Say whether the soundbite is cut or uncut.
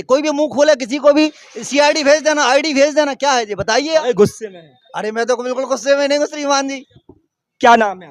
uncut